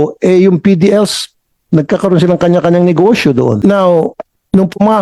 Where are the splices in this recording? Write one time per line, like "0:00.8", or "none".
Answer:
0:03.6